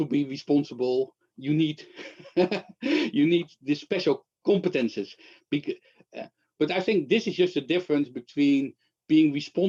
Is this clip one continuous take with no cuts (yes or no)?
yes